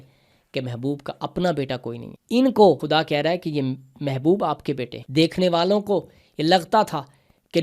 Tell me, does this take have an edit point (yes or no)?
yes